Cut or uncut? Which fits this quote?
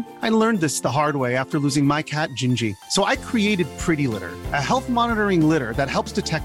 uncut